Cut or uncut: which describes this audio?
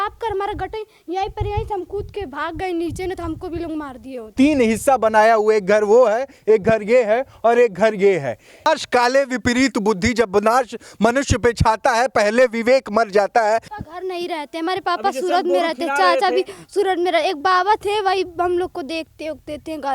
cut